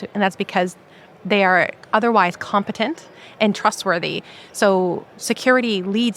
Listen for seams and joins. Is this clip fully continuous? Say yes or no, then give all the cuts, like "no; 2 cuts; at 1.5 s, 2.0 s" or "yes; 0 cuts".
no; 1 cut; at 1.8 s